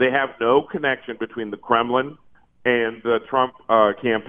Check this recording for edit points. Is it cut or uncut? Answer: uncut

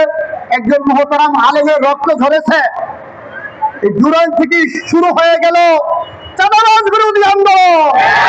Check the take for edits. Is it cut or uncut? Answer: uncut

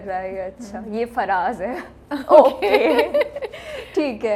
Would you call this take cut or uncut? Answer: uncut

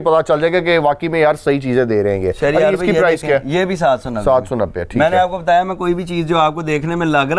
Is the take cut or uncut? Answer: uncut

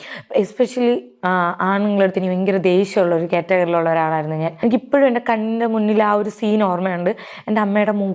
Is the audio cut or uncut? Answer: cut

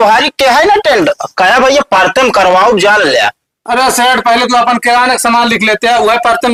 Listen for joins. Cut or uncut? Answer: uncut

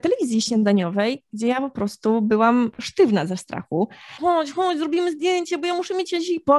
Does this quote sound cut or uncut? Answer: cut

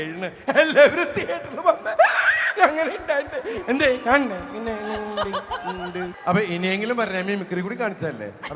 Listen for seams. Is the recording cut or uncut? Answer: cut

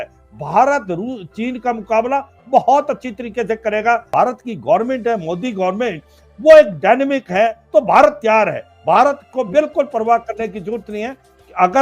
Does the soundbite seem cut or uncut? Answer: cut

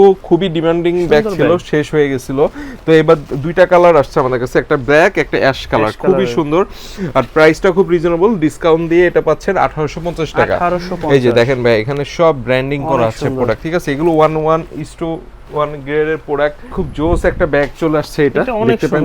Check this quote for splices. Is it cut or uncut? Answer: uncut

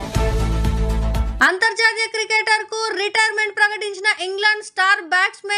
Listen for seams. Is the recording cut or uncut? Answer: cut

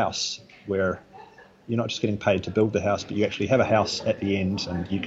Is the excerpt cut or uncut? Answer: uncut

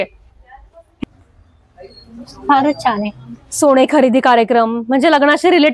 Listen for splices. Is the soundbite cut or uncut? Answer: cut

